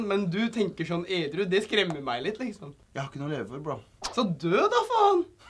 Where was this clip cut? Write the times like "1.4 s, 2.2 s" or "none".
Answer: 2.7 s, 4.0 s

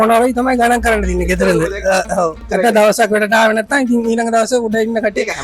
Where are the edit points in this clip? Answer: 2.4 s

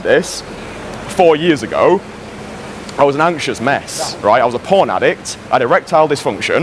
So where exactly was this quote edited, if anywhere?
none

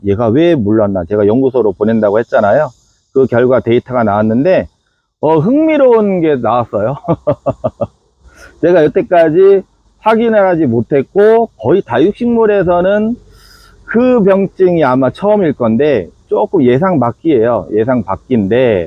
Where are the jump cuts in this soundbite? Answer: none

